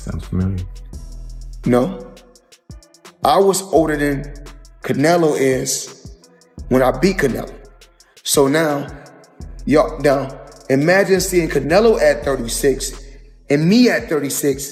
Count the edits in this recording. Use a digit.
0